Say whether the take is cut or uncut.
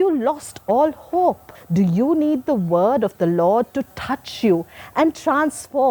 cut